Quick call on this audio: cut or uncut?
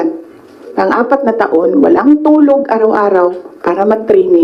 uncut